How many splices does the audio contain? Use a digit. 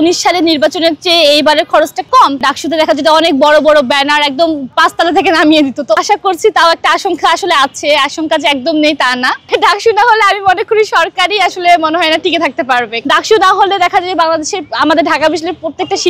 4